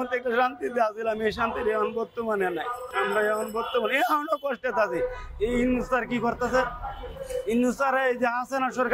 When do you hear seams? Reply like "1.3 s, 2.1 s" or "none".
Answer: 2.8 s